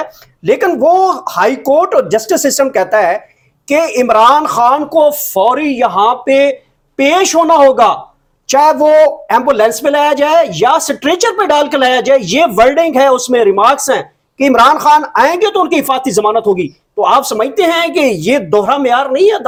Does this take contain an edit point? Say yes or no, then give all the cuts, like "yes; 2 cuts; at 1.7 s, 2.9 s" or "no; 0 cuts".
no; 0 cuts